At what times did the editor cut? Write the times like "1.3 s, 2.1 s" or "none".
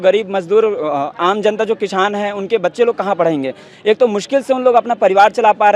none